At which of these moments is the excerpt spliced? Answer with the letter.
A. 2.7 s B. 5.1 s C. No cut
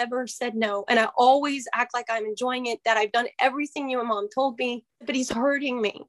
B